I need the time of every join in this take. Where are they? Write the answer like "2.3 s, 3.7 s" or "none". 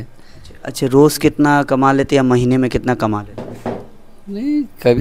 none